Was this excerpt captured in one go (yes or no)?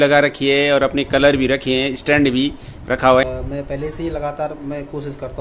no